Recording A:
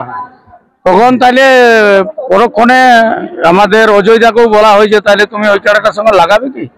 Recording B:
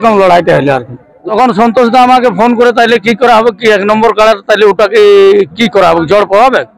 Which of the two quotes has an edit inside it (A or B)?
B